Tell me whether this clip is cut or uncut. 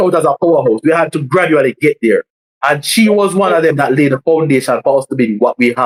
uncut